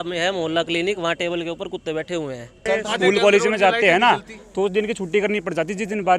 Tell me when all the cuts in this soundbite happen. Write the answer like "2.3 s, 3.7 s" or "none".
2.5 s